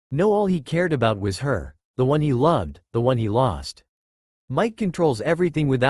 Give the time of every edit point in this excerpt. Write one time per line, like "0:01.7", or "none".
0:04.4